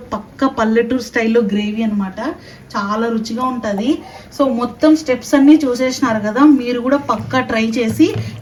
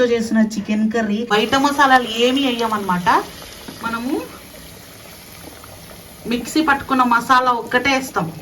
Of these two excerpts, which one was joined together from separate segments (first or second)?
second